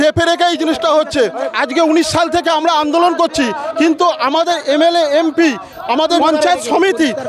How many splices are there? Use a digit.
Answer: 2